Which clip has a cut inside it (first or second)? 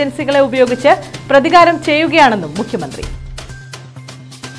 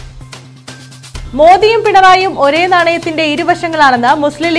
second